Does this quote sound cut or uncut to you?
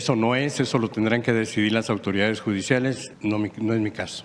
cut